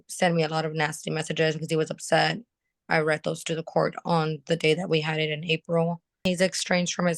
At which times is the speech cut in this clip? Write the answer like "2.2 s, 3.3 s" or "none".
6.2 s